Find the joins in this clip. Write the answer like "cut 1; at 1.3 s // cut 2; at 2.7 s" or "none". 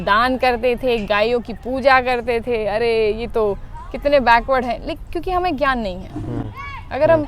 none

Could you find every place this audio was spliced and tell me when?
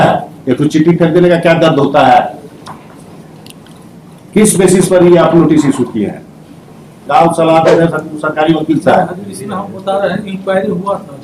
cut 1; at 7.0 s

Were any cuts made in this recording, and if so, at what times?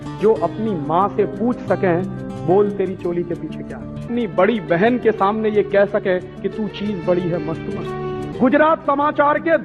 cut 1; at 4.1 s // cut 2; at 8.2 s

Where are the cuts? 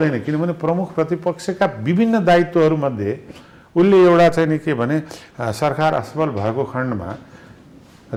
none

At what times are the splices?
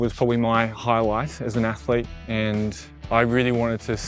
cut 1; at 2.9 s

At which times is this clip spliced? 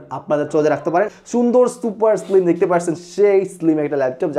cut 1; at 1.1 s

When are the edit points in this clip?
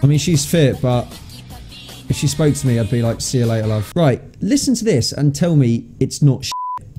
cut 1; at 3.8 s

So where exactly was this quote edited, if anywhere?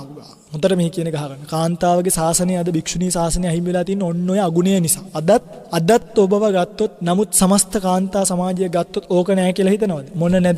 cut 1; at 5.6 s // cut 2; at 6.9 s

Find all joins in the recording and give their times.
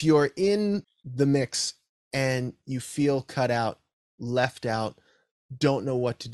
cut 1; at 1.0 s

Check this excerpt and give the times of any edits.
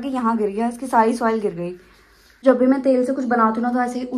cut 1; at 2.4 s

